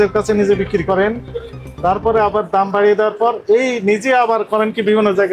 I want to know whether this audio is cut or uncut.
uncut